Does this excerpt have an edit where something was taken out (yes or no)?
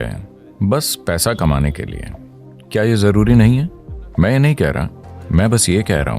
yes